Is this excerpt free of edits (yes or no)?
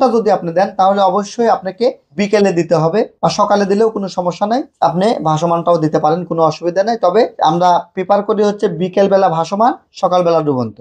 yes